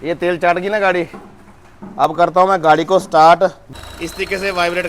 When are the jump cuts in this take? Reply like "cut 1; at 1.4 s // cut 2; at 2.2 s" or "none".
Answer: cut 1; at 3.6 s